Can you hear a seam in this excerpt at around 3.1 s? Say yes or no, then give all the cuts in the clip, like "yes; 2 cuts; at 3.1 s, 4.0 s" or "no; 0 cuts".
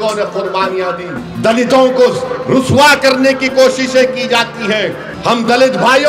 no; 2 cuts; at 1.2 s, 5.1 s